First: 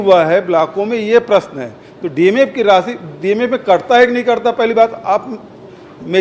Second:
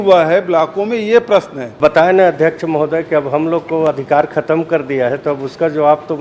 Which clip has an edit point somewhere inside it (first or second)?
second